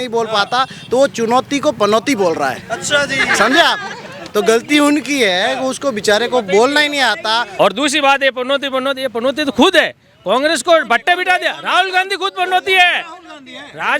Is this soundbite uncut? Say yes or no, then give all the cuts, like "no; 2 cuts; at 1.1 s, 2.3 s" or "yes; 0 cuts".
no; 1 cut; at 7.5 s